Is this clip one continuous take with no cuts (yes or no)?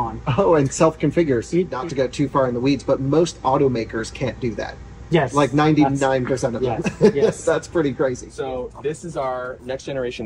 no